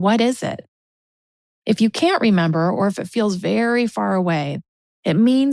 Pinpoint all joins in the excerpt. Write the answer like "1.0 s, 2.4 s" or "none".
4.5 s